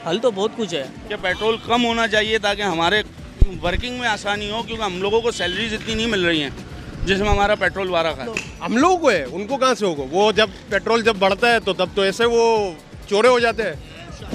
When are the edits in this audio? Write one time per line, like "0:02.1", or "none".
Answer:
0:00.9
0:08.5